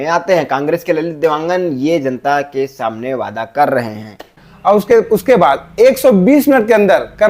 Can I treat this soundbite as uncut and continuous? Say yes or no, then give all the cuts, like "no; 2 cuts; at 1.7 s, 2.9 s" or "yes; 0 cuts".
no; 1 cut; at 4.4 s